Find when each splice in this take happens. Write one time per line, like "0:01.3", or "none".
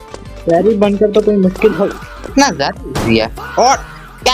0:02.3